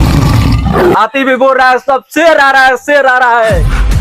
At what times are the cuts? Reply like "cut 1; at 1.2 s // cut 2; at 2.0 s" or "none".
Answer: cut 1; at 0.9 s